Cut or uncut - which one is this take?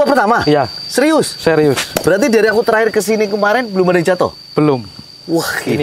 uncut